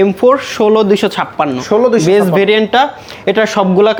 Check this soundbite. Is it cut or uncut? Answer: uncut